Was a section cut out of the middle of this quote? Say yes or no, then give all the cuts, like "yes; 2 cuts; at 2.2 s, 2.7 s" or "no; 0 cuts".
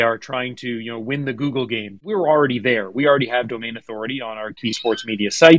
yes; 2 cuts; at 2.2 s, 4.6 s